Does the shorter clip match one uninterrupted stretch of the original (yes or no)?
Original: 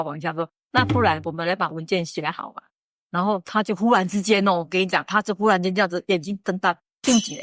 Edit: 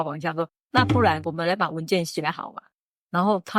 yes